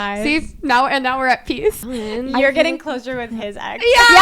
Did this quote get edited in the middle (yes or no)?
yes